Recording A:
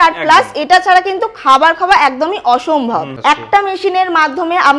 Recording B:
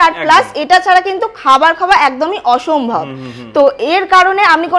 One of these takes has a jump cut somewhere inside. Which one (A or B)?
A